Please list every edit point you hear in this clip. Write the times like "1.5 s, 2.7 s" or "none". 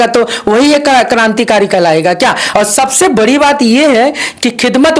2.4 s